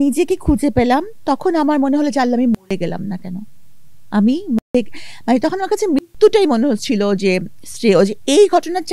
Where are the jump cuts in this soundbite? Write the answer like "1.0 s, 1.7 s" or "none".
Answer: none